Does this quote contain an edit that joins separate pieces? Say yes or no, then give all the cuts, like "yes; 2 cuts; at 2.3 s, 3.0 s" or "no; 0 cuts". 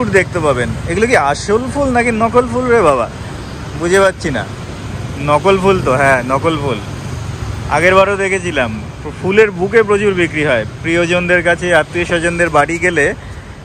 no; 0 cuts